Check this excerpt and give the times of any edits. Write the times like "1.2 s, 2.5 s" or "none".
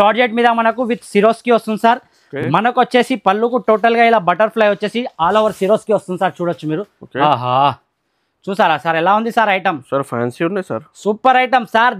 none